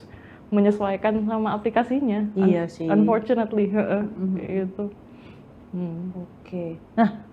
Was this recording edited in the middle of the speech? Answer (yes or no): no